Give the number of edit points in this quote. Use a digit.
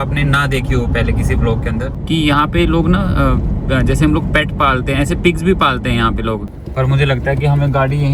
2